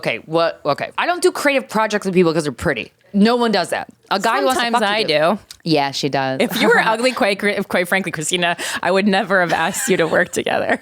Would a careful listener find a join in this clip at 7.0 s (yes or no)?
no